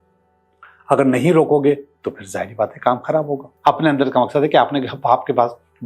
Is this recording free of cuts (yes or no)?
no